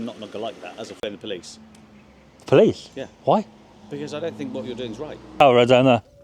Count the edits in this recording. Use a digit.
2